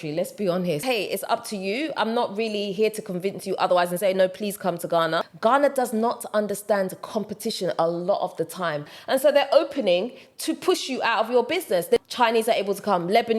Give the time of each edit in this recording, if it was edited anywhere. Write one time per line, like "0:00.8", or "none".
0:00.8
0:05.3
0:08.9
0:12.0